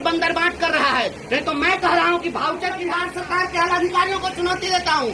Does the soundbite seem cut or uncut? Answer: cut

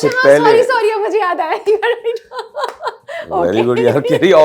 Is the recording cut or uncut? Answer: uncut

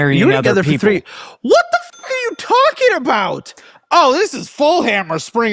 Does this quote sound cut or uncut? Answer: uncut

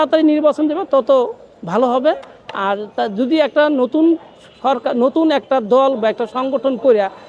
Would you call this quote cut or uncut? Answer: uncut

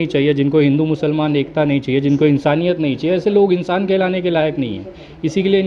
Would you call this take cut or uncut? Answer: uncut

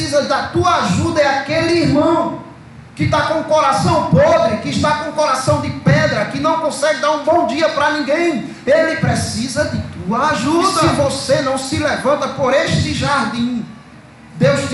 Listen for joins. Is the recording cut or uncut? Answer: cut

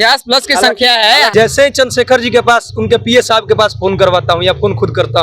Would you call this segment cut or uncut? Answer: cut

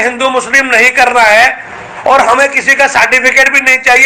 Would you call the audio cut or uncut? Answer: uncut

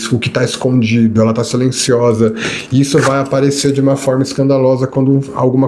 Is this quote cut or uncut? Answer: uncut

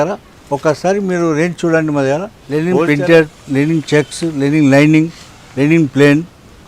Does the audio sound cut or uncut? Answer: cut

